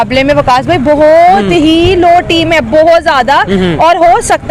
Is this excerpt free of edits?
yes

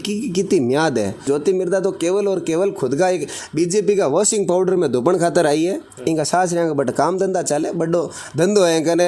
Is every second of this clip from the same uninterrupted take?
no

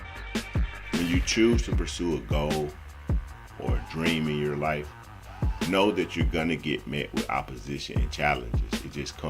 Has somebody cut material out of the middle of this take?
yes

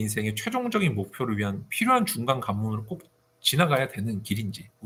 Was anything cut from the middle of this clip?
no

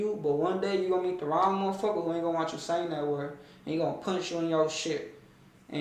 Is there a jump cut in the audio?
no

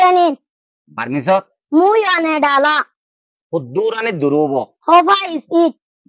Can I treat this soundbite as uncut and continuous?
yes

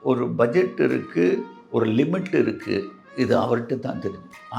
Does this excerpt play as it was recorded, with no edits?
yes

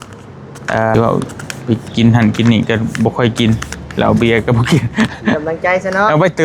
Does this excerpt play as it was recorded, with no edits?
no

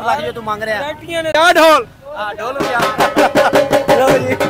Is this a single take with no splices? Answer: no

